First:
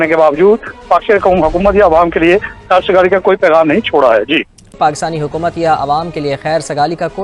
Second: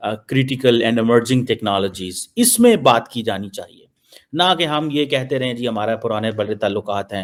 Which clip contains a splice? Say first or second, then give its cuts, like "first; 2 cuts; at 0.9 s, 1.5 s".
first; 1 cut; at 4.7 s